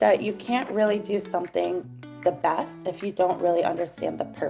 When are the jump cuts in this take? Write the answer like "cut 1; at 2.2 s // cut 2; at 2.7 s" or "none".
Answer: none

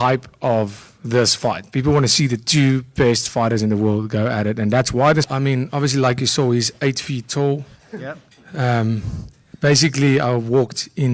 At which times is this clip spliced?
cut 1; at 5.3 s

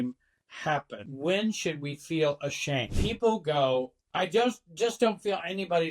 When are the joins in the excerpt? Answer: cut 1; at 3.0 s

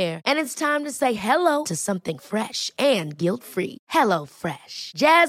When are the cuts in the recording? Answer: none

